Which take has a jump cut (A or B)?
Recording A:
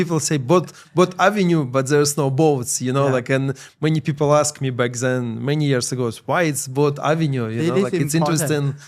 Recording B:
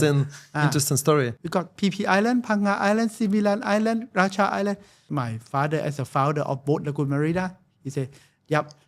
B